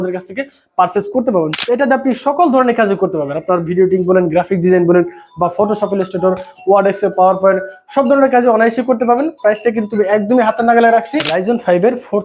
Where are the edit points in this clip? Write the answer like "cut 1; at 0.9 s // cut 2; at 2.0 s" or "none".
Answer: cut 1; at 1.6 s // cut 2; at 11.3 s